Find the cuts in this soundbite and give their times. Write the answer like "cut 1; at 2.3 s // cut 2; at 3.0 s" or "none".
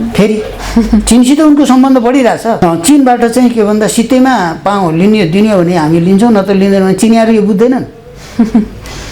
cut 1; at 2.6 s